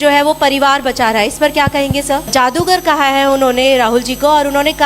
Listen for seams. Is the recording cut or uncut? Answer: cut